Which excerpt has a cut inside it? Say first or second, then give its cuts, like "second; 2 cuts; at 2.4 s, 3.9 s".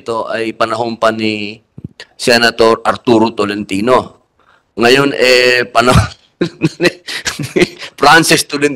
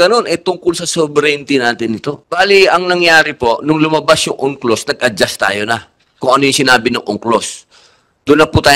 second; 1 cut; at 2.2 s